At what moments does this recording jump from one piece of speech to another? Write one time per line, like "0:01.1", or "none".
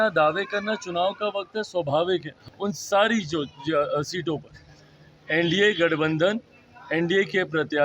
0:02.3